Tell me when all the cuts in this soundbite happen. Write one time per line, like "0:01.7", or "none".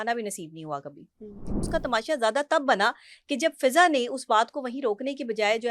0:01.7